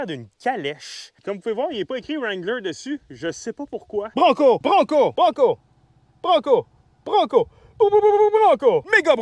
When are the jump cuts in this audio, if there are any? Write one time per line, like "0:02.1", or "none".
0:01.1
0:04.1